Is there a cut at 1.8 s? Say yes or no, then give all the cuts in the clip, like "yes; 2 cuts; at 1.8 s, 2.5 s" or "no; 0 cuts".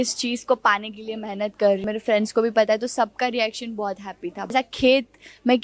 yes; 2 cuts; at 1.8 s, 4.5 s